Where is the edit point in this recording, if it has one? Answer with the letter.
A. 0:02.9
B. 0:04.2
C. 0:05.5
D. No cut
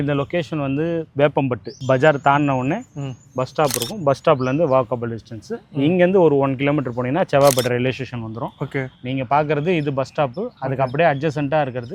D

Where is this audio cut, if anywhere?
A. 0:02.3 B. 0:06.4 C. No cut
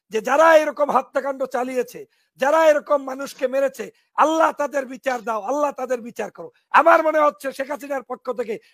C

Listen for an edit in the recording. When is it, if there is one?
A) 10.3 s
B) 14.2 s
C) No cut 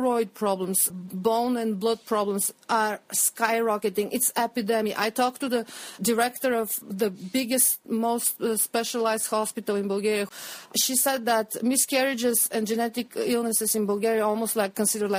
A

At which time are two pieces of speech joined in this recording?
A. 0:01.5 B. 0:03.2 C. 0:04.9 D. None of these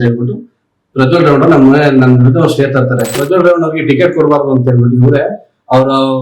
B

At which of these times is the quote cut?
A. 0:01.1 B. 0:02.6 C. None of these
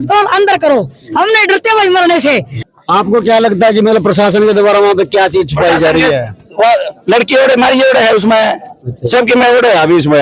B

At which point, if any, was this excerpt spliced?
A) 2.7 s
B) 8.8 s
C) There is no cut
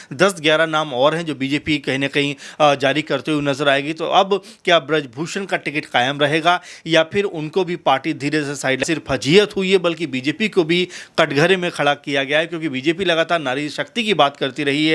B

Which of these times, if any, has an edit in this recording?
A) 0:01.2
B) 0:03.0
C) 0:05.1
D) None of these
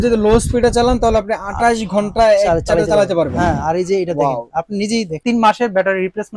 C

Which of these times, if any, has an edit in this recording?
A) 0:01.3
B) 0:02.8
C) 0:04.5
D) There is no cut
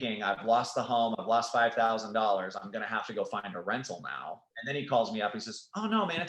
C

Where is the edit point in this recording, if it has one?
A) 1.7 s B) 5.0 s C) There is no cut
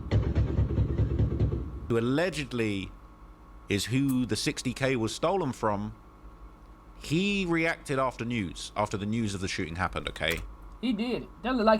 A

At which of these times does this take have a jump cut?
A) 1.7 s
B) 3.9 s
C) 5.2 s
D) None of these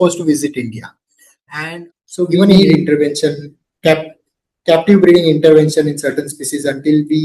A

